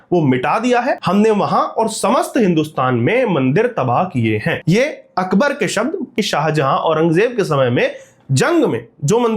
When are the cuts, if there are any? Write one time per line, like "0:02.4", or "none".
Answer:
0:01.0
0:06.1